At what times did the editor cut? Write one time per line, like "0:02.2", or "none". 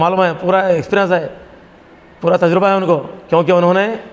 none